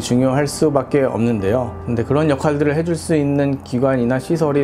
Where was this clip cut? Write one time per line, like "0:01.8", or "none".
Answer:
0:01.7